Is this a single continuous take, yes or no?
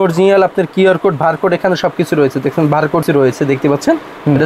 no